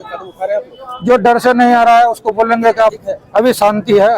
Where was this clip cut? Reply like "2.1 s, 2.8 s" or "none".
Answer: 2.9 s